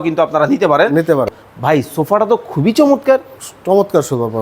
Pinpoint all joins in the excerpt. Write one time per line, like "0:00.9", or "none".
0:01.3